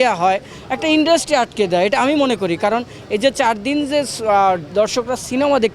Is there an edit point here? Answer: no; 0 cuts

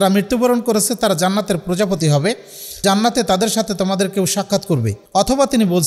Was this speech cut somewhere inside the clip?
yes; 2 cuts; at 2.8 s, 5.0 s

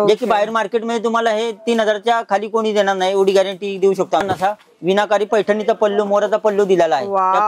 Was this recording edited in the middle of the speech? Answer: yes; 1 cut; at 4.2 s

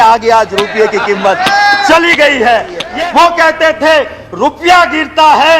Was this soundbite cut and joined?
yes; 1 cut; at 2.8 s

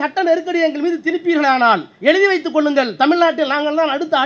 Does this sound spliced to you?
no; 0 cuts

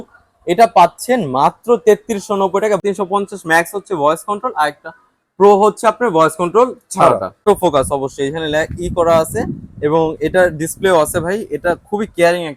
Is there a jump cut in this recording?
yes; 2 cuts; at 2.8 s, 7.4 s

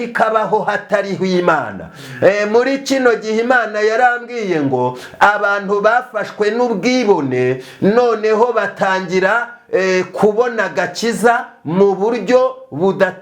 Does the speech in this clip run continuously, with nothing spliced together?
yes; 0 cuts

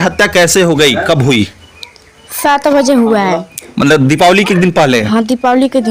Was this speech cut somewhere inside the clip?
no; 0 cuts

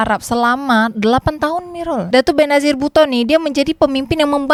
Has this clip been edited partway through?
no; 0 cuts

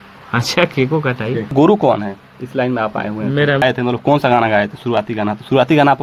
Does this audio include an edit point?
yes; 2 cuts; at 1.5 s, 3.6 s

